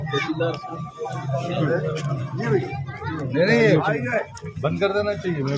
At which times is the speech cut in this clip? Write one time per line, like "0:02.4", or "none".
none